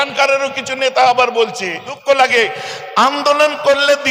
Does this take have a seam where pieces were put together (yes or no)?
yes